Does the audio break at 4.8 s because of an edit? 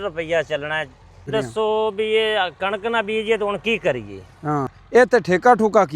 yes; 2 cuts; at 1.3 s, 4.8 s

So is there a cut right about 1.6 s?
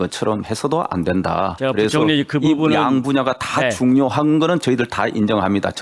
yes; 1 cut; at 1.6 s

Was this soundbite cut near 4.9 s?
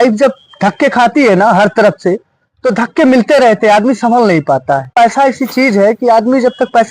yes; 1 cut; at 4.9 s

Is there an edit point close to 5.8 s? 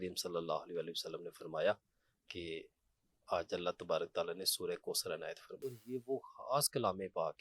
yes; 1 cut; at 5.8 s

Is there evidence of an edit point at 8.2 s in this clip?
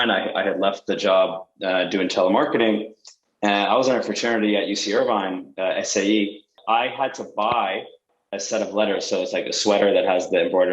no; 1 cut; at 6.6 s

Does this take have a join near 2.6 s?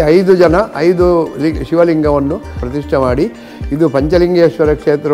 yes; 1 cut; at 2.6 s

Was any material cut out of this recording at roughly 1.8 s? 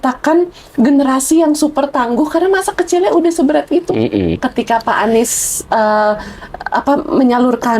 no; 1 cut; at 4.4 s

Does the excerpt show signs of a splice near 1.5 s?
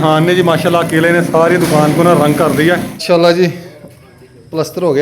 no; 1 cut; at 2.9 s

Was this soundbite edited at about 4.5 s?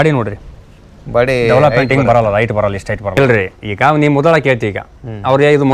no; 1 cut; at 3.2 s

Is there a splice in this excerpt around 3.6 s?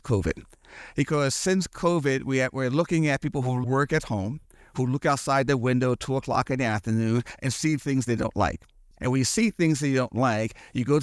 yes; 1 cut; at 3.6 s

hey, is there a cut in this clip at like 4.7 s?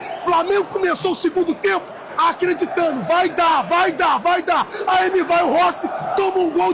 no; 0 cuts

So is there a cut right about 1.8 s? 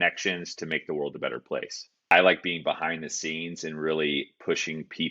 yes; 1 cut; at 1.8 s

